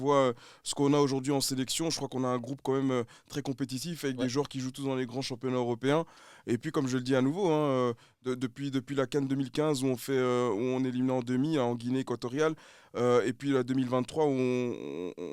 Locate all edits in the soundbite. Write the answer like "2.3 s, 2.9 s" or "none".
none